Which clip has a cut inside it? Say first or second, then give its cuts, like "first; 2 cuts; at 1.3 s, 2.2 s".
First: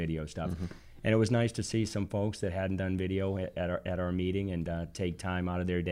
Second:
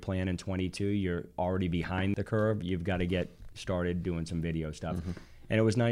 second; 1 cut; at 2.1 s